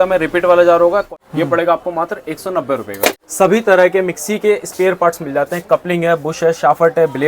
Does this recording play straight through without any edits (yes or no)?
no